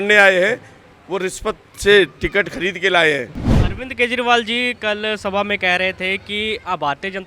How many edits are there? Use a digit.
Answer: 1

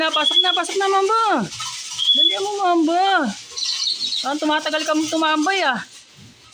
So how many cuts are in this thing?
0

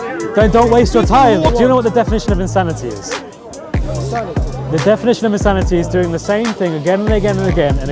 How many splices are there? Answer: 1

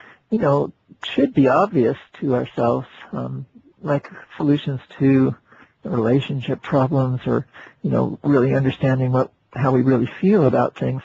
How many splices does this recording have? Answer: 0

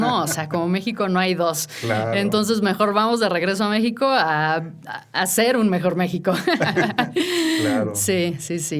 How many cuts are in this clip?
0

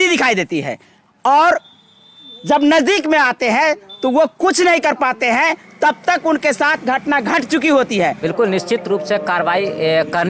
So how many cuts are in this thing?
1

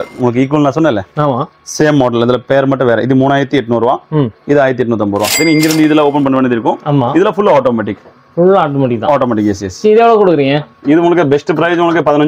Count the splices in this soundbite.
1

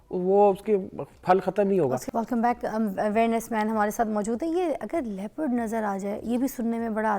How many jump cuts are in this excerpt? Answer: 0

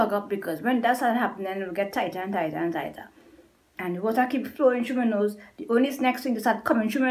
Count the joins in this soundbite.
0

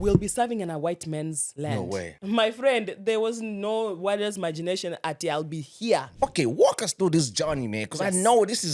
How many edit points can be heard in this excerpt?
2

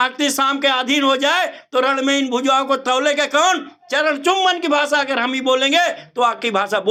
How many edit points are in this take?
0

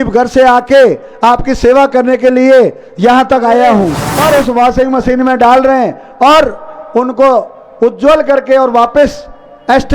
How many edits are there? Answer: 1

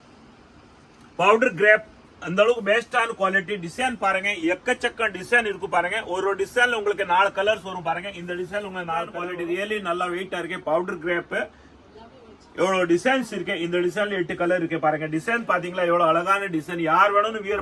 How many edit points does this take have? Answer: 1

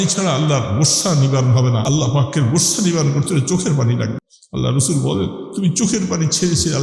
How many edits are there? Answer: 2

